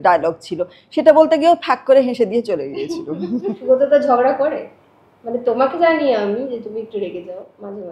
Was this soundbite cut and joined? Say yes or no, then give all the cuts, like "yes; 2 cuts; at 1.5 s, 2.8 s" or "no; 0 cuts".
yes; 1 cut; at 3.5 s